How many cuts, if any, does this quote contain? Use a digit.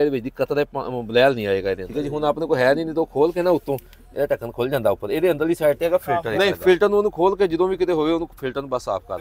2